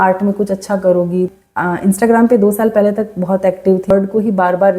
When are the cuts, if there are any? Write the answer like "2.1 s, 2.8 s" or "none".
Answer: 1.3 s, 3.9 s